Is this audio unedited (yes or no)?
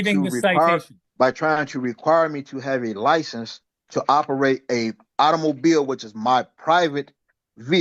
no